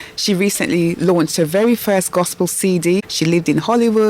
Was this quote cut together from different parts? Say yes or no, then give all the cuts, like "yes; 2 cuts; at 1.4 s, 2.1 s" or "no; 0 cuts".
no; 0 cuts